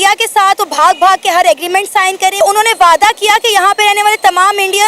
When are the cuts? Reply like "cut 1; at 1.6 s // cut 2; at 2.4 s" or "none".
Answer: cut 1; at 2.4 s